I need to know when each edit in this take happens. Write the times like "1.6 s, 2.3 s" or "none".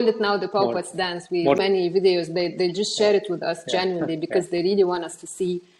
1.6 s

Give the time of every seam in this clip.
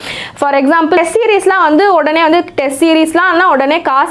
1.0 s

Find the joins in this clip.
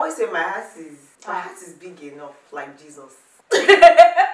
3.4 s

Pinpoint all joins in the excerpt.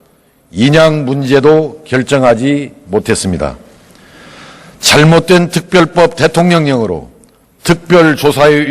2.9 s

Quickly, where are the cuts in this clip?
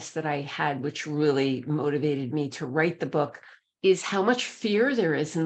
none

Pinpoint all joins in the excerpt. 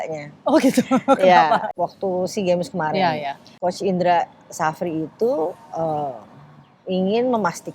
1.7 s, 3.6 s

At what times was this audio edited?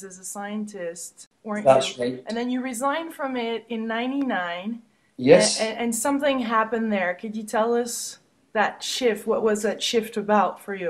none

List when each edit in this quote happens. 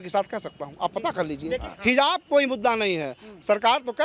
1.7 s

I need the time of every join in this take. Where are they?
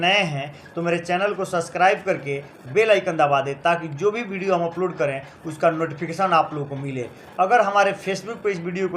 none

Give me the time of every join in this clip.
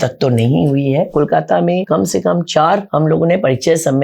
1.1 s, 1.8 s, 2.9 s

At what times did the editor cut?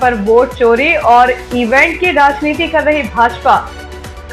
none

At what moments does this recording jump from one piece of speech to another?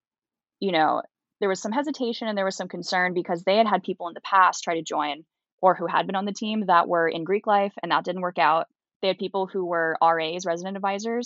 1.3 s, 8.9 s

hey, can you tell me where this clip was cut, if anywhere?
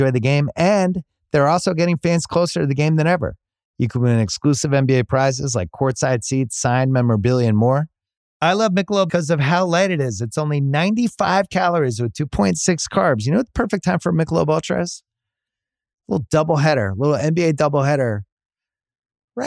none

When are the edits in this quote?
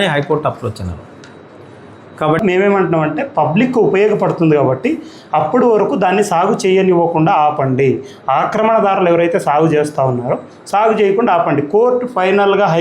2.4 s

